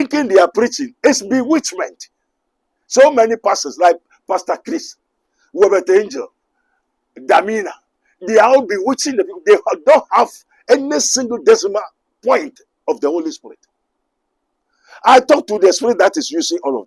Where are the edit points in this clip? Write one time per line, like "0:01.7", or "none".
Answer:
none

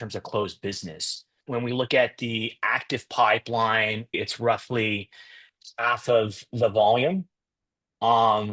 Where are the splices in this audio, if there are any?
0:04.2

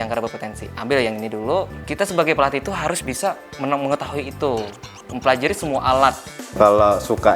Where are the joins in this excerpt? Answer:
0:01.8
0:03.5
0:06.5

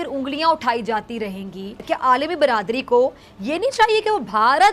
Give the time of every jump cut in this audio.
0:01.8

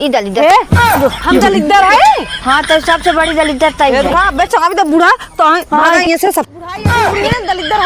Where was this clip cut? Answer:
none

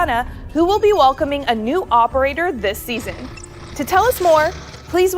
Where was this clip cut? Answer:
none

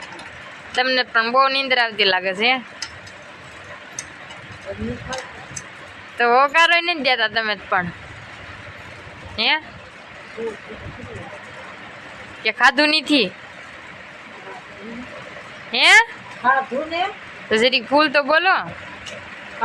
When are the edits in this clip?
none

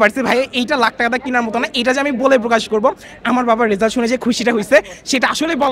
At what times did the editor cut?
none

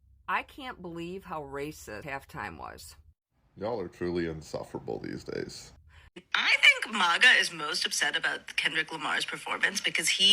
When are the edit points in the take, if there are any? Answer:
0:02.0
0:06.2

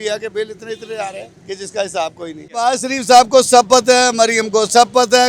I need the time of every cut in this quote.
0:01.3
0:02.7

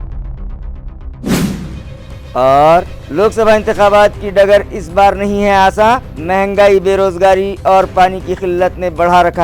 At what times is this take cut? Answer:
0:01.5

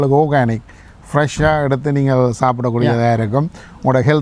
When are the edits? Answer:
none

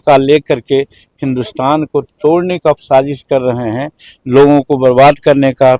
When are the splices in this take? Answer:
none

